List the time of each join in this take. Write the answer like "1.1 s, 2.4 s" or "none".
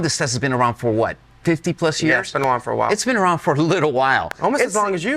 none

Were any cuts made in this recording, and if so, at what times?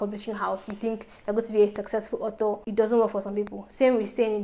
2.6 s

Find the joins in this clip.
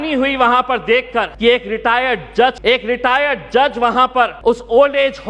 1.3 s, 2.6 s, 4.3 s

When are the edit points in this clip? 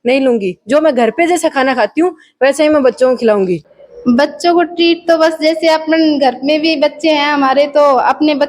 3.6 s

